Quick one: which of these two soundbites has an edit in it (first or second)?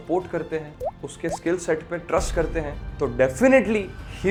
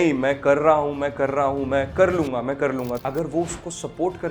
second